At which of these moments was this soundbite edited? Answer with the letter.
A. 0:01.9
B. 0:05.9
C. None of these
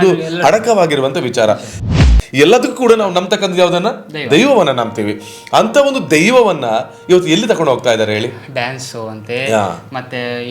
A